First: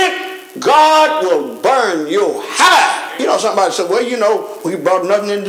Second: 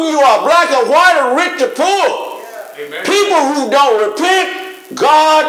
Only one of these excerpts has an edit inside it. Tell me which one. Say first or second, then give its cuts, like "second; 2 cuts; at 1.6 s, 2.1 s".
first; 1 cut; at 3.1 s